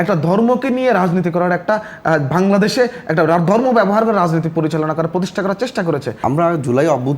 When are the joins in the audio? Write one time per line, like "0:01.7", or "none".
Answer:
0:06.1